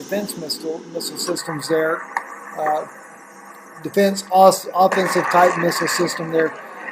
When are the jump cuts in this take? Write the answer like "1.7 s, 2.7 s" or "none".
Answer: 2.4 s